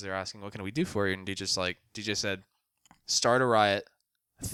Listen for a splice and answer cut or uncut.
uncut